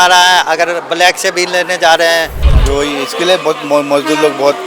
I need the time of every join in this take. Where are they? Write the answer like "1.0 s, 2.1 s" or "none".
2.4 s